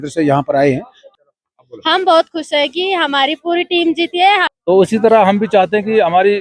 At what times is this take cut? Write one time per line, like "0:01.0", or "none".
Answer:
0:00.9
0:04.5